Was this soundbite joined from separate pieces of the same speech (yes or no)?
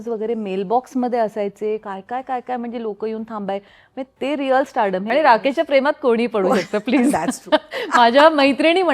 yes